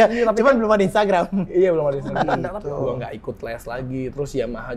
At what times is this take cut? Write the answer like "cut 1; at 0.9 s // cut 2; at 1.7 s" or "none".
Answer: cut 1; at 2.5 s